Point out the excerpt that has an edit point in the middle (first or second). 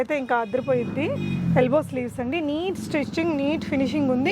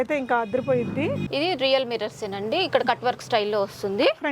second